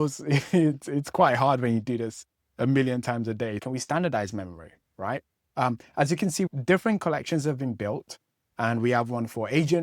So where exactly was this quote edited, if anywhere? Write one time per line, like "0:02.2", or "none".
0:03.6
0:06.5